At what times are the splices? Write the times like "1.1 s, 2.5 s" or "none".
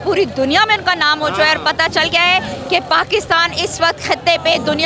none